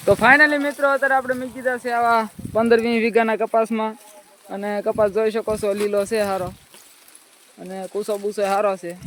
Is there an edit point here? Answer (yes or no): no